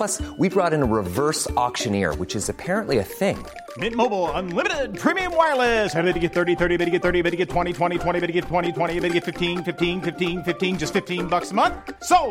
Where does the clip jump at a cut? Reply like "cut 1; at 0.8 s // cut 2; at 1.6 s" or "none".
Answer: none